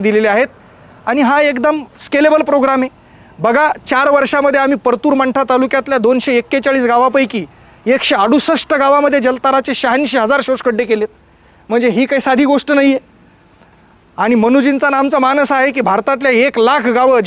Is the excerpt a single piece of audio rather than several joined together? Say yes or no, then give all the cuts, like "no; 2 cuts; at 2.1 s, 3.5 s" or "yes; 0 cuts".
yes; 0 cuts